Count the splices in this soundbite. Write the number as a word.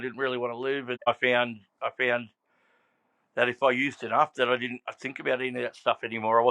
one